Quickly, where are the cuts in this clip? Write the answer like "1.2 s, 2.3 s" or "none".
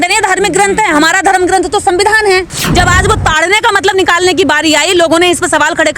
2.6 s